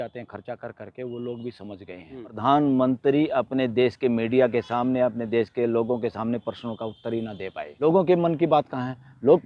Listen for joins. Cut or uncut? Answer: cut